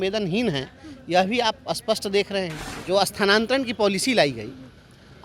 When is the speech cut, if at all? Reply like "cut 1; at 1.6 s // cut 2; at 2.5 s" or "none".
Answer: cut 1; at 2.7 s